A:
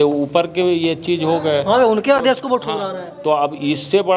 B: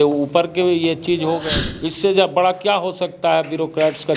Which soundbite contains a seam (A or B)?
B